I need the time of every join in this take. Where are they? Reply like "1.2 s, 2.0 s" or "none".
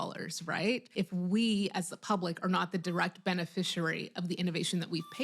0.9 s